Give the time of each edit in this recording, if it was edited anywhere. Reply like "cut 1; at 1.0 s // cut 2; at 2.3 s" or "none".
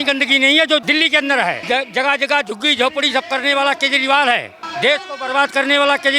cut 1; at 0.8 s // cut 2; at 1.6 s // cut 3; at 4.6 s